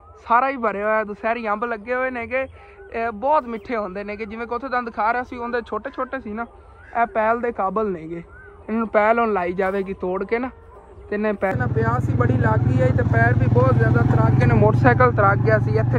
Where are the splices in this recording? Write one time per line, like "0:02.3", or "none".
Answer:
0:11.5